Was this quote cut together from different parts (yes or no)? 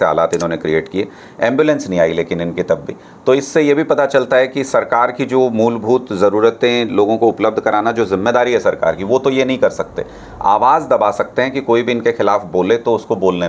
no